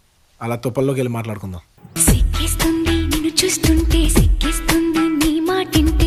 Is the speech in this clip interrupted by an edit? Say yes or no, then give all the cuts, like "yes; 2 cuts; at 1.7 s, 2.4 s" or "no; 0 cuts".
no; 0 cuts